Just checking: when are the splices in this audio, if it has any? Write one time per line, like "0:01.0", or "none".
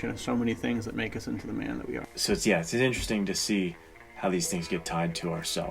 0:02.1